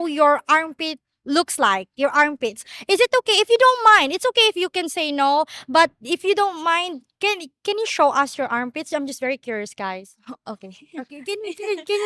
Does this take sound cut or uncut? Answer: uncut